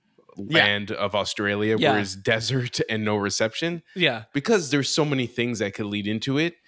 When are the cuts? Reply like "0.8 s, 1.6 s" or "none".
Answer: none